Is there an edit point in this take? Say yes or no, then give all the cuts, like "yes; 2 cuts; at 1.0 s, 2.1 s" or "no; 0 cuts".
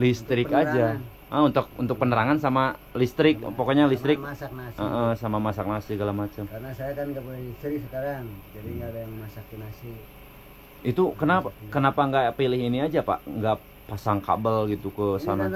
no; 0 cuts